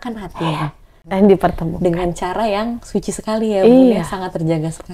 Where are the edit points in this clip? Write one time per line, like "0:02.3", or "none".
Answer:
0:00.9